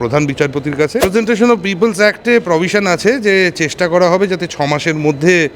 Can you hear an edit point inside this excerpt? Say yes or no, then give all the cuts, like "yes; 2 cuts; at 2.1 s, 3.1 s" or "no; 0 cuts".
yes; 1 cut; at 1.0 s